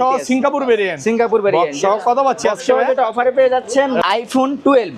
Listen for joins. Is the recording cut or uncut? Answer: cut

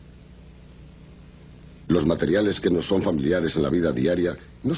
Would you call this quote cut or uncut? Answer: uncut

